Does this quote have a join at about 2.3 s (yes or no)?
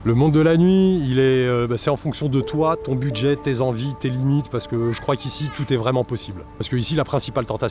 no